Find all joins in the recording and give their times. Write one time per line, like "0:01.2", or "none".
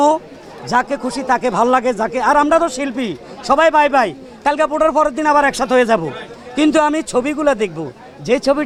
none